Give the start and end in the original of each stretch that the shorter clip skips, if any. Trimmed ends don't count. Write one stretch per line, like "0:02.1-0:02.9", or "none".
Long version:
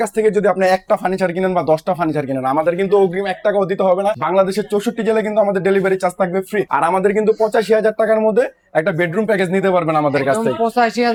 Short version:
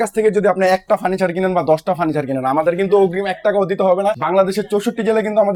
none